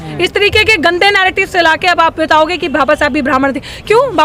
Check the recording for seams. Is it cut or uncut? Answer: uncut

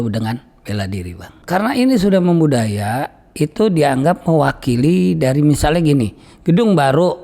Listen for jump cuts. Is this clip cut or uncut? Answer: cut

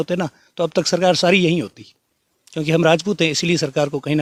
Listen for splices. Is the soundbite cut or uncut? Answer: uncut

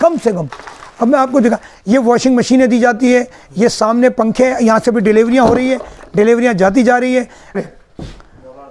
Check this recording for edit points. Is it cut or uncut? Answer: cut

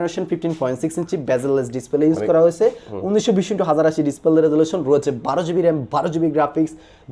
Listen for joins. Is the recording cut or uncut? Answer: uncut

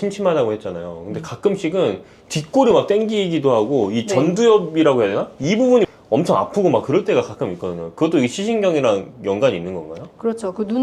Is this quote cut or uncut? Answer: uncut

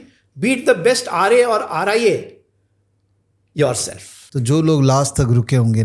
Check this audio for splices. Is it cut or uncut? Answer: cut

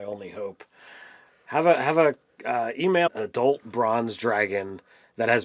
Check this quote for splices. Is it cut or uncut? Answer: uncut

